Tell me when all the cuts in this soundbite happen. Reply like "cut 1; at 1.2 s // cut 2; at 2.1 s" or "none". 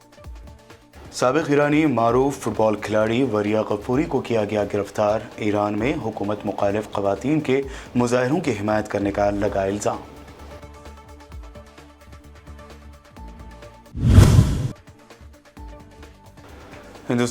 cut 1; at 0.9 s